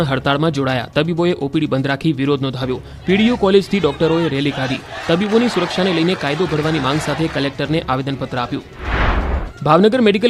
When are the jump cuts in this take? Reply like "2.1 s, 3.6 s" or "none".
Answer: none